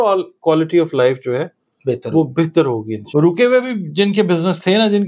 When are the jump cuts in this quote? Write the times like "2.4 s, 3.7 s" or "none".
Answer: 2.9 s